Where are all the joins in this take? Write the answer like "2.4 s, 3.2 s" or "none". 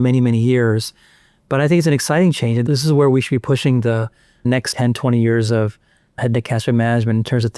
2.6 s, 4.6 s, 6.2 s